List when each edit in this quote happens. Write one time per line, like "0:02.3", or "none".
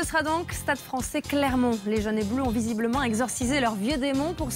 0:02.9